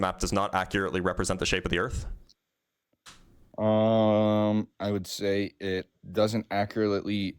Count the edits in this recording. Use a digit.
0